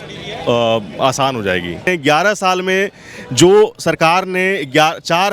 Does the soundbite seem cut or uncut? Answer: cut